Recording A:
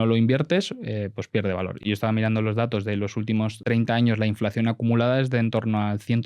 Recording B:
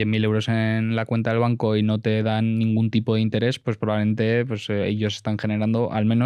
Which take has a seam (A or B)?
A